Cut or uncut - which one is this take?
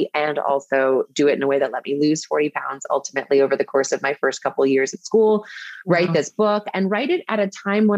uncut